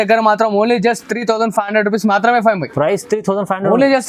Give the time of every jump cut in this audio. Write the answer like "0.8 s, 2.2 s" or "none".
none